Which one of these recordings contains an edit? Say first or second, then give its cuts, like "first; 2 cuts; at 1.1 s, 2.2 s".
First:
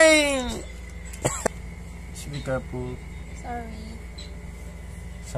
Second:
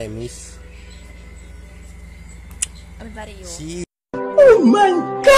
first; 1 cut; at 1.5 s